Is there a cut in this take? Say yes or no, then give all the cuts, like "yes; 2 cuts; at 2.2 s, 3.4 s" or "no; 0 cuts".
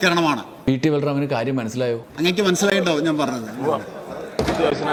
no; 0 cuts